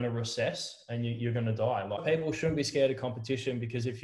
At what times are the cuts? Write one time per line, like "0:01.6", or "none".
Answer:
0:02.0